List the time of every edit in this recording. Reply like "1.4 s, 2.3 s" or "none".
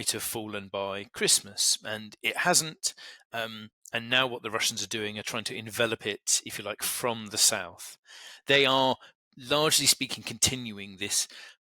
8.3 s